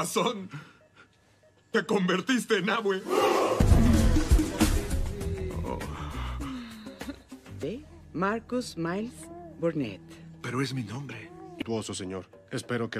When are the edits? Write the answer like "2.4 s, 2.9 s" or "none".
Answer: 3.5 s